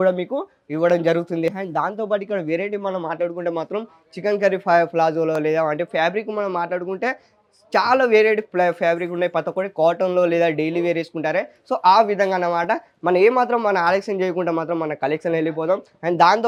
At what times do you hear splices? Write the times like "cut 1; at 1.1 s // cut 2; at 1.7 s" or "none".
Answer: none